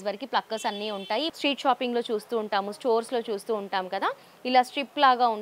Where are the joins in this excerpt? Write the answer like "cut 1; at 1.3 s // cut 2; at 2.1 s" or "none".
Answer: cut 1; at 1.3 s